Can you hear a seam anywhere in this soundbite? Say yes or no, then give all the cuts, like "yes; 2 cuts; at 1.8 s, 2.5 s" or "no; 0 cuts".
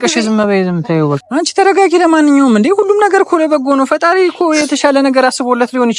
yes; 1 cut; at 1.2 s